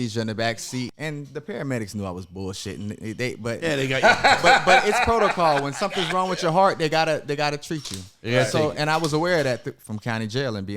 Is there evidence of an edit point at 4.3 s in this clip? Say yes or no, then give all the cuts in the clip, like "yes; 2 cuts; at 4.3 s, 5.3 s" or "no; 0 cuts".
no; 1 cut; at 0.9 s